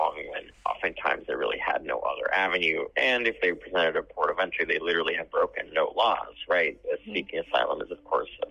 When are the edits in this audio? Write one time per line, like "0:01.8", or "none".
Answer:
none